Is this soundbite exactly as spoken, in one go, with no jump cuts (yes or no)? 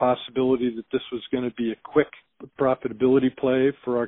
no